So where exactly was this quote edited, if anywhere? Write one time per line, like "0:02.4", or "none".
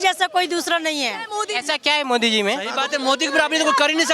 0:01.4
0:02.8